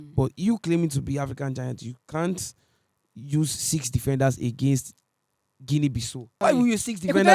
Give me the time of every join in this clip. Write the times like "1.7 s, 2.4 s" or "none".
6.3 s

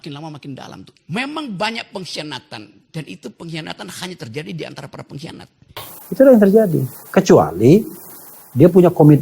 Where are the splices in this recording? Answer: 0.9 s, 5.9 s

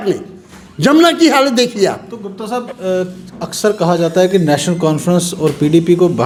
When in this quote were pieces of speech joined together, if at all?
none

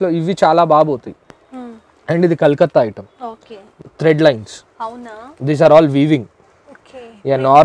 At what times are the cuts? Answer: 3.8 s

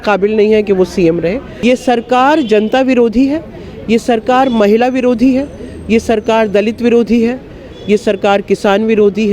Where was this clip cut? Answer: 1.5 s

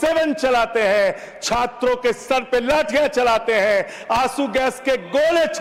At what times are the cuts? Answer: none

